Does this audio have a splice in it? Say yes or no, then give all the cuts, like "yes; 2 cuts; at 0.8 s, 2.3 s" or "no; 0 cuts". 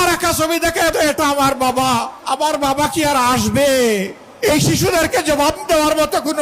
yes; 3 cuts; at 0.9 s, 2.1 s, 4.2 s